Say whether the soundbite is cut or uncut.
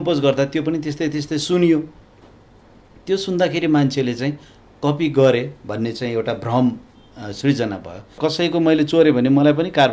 cut